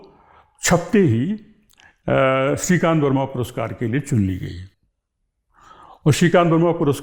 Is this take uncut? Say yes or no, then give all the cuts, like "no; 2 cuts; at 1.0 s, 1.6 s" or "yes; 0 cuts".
yes; 0 cuts